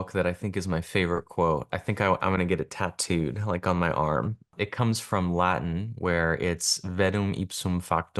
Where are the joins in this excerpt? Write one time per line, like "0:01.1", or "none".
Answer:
0:04.5

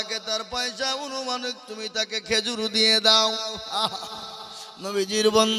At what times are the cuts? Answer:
0:03.9

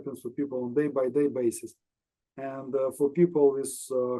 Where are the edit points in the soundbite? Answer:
none

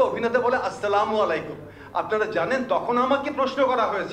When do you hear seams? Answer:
none

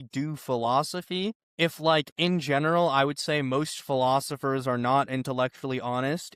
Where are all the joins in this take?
0:01.4

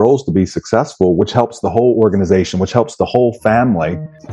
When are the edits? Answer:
none

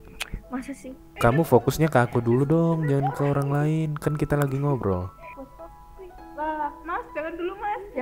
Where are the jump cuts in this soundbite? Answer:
0:01.0
0:05.2

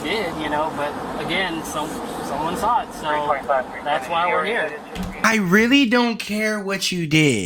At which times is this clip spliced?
none

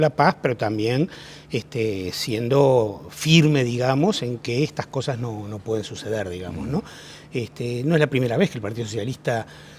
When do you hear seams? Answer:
0:06.6

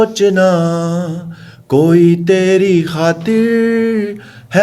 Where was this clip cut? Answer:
none

